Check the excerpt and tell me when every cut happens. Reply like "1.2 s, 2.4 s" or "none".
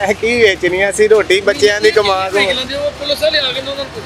none